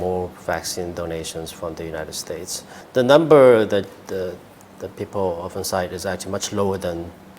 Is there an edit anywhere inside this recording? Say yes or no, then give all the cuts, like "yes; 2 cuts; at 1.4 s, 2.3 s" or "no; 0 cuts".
yes; 1 cut; at 2.8 s